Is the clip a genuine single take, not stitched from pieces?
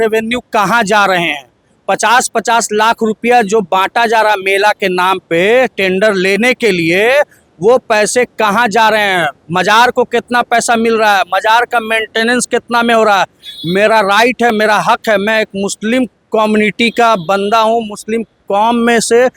yes; 0 cuts

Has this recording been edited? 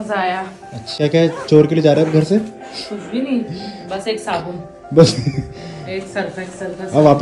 yes; 1 cut; at 1.0 s

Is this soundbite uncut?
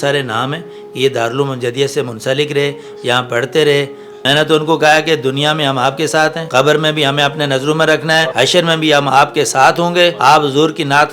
no; 4 cuts; at 4.0 s, 6.4 s, 8.3 s, 10.2 s

